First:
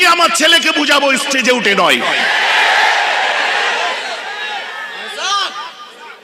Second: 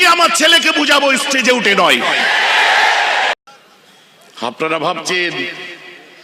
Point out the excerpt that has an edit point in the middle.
second; 1 cut; at 3.3 s

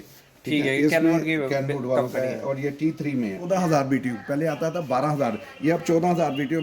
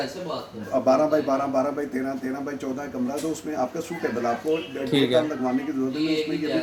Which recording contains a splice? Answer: first; 1 cut; at 3.4 s

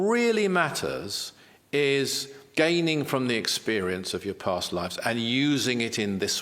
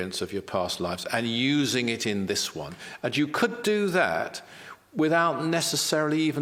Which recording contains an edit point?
first; 1 cut; at 2.4 s

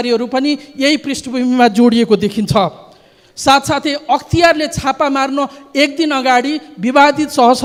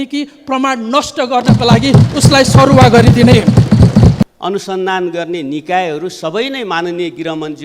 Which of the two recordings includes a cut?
second; 1 cut; at 4.2 s

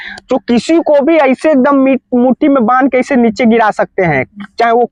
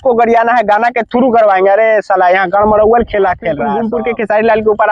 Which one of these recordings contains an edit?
second; 1 cut; at 3.8 s

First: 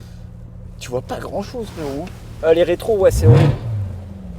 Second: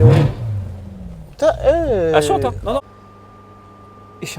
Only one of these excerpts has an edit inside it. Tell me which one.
second; 1 cut; at 2.8 s

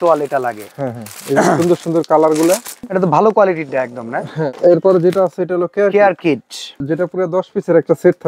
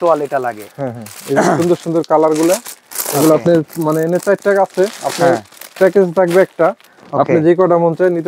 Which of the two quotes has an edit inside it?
first; 3 cuts; at 2.8 s, 4.4 s, 6.7 s

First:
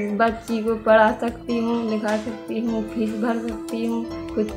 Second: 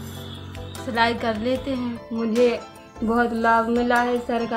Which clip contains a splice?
second; 1 cut; at 2.0 s

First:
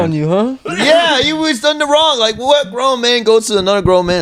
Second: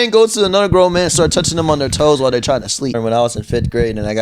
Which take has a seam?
second; 1 cut; at 2.9 s

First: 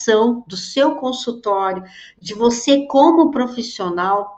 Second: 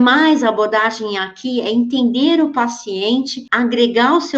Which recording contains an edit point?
second; 1 cut; at 3.4 s

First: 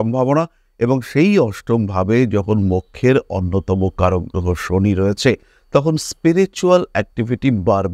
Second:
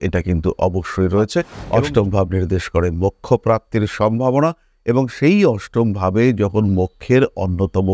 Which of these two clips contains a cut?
second; 1 cut; at 1.6 s

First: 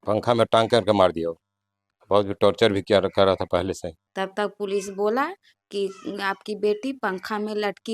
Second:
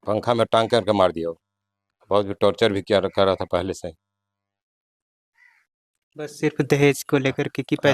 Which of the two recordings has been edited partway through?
first; 1 cut; at 4.0 s

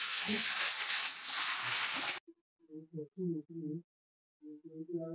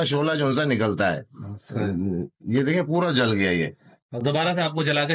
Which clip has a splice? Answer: second; 1 cut; at 3.9 s

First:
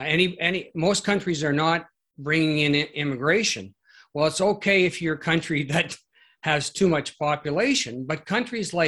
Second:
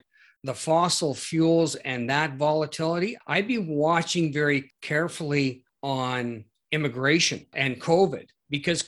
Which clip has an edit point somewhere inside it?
second; 5 cuts; at 3.2 s, 4.8 s, 5.7 s, 6.5 s, 7.5 s

